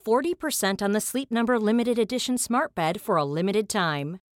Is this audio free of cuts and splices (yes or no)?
yes